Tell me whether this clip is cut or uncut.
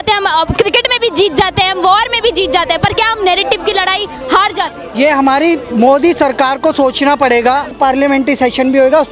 cut